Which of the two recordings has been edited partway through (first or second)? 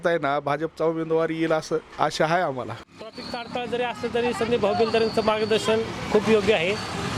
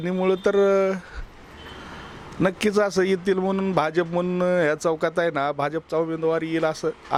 first